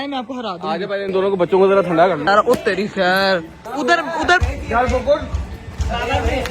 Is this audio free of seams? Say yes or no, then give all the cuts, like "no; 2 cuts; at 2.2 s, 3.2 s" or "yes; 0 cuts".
no; 2 cuts; at 2.3 s, 3.6 s